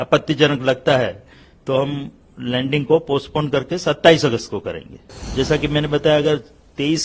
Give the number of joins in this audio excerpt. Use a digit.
1